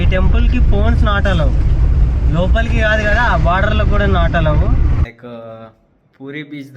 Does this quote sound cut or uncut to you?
cut